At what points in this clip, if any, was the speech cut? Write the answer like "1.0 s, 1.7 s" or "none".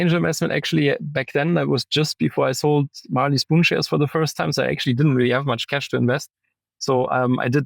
none